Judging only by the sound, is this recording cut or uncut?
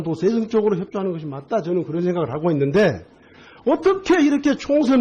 cut